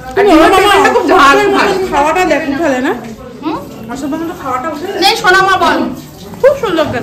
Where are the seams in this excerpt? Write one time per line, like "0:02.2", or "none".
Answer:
none